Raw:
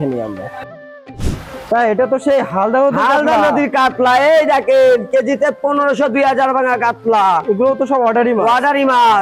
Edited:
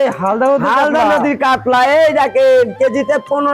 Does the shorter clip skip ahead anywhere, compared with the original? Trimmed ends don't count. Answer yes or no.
no